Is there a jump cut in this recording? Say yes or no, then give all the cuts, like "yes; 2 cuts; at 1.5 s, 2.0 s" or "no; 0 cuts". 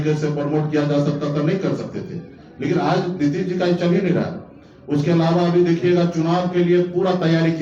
no; 0 cuts